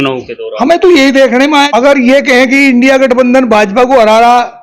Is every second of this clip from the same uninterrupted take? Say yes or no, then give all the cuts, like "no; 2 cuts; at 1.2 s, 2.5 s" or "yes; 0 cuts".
no; 1 cut; at 1.7 s